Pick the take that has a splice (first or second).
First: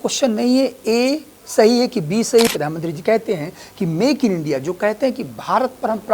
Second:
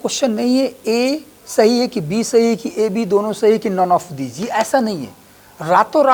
first